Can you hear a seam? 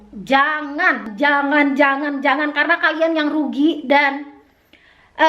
yes; 1 cut; at 1.1 s

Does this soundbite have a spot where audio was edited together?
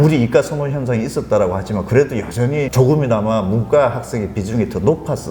yes; 1 cut; at 2.7 s

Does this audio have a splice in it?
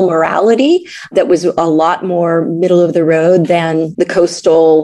yes; 2 cuts; at 1.1 s, 3.9 s

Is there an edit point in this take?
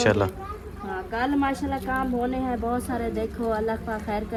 no; 0 cuts

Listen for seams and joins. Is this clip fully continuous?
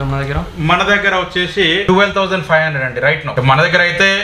no; 2 cuts; at 1.8 s, 3.3 s

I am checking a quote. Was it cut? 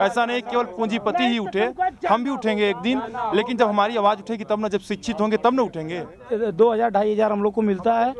yes; 1 cut; at 6.2 s

